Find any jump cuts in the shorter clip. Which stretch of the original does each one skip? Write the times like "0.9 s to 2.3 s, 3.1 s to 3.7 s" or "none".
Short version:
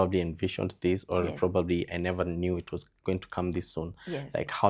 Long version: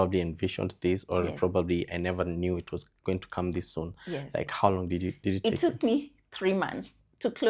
none